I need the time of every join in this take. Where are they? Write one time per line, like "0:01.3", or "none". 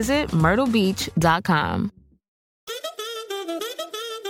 0:02.7

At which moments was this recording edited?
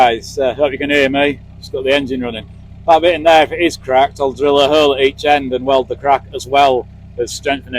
none

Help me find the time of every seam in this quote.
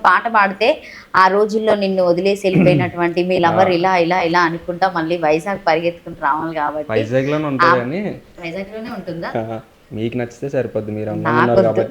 0:09.7

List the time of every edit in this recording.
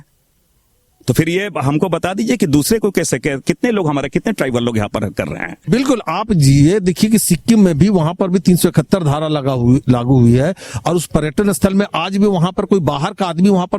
0:05.6

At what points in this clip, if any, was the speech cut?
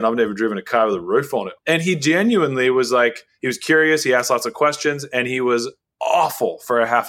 0:01.5
0:05.8

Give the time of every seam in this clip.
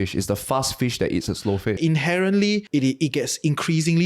0:01.8
0:02.7

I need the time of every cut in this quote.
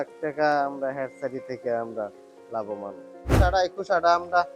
0:03.3

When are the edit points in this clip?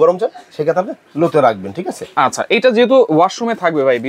none

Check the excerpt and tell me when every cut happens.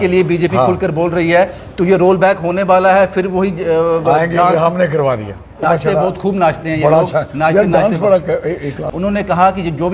0:05.5
0:08.8

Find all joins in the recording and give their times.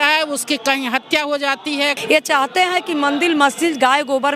0:02.0

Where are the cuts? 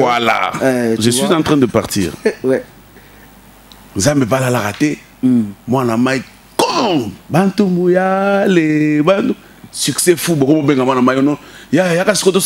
none

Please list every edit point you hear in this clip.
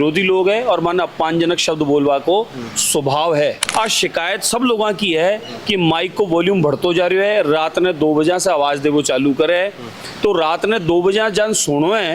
0:03.6

